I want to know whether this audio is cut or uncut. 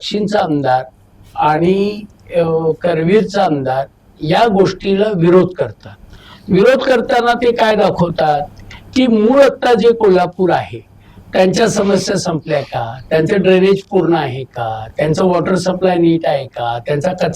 uncut